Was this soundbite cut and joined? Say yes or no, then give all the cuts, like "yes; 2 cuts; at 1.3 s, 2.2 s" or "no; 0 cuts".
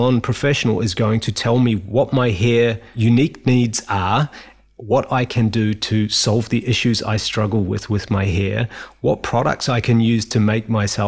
yes; 2 cuts; at 1.8 s, 2.9 s